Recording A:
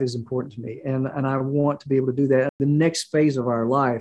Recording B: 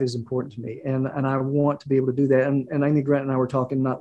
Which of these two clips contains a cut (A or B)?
A